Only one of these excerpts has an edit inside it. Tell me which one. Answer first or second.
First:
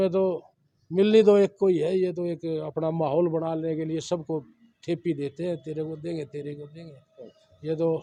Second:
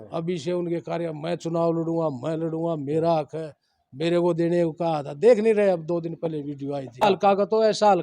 second